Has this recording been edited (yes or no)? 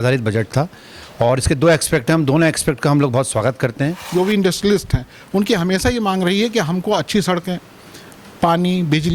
yes